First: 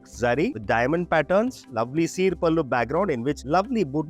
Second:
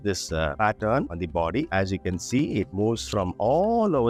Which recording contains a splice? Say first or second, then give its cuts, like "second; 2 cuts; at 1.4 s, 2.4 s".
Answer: first; 1 cut; at 1.6 s